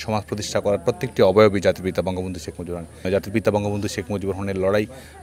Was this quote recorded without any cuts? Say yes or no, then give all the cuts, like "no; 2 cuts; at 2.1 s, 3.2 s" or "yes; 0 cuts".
no; 1 cut; at 3.1 s